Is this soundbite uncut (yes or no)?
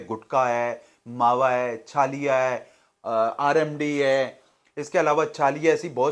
yes